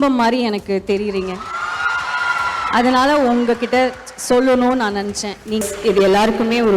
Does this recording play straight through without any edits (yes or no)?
no